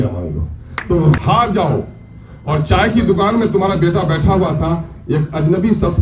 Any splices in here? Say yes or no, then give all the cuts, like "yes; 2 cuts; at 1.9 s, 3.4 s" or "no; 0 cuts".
yes; 1 cut; at 1.2 s